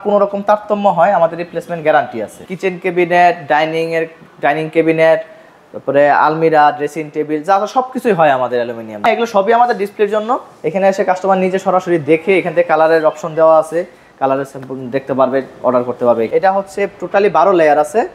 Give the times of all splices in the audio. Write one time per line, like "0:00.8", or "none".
0:02.4
0:09.0
0:16.3